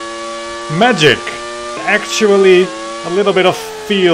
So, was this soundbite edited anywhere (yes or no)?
yes